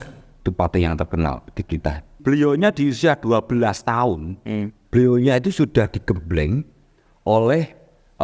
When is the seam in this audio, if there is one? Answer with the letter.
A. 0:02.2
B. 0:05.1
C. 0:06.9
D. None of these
A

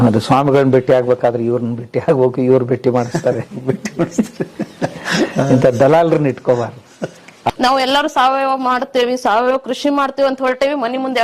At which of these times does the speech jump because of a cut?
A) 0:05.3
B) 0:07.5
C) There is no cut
B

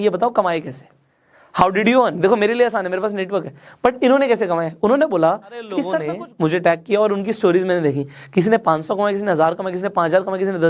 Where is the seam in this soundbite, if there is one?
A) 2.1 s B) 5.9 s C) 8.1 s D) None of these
B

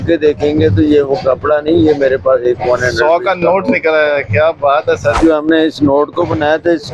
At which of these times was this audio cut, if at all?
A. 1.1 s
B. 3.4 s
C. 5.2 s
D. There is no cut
C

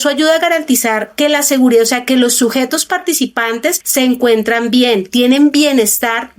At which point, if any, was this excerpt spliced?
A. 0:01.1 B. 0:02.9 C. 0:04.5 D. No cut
A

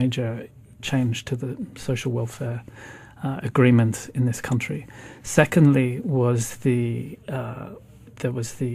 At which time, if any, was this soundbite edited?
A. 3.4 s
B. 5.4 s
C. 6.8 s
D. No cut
B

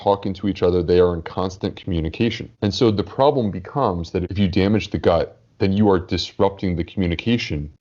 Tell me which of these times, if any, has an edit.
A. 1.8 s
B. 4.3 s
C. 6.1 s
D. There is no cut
B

